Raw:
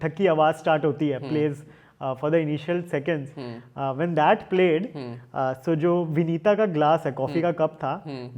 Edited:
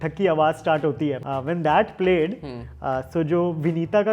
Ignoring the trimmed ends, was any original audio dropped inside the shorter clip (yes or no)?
yes